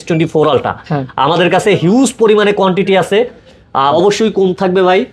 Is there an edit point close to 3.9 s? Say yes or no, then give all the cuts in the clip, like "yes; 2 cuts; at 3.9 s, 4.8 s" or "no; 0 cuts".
yes; 1 cut; at 3.9 s